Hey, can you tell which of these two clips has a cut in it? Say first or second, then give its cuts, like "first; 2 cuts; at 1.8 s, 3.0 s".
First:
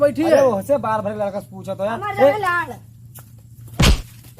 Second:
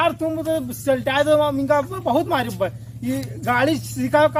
first; 1 cut; at 3.3 s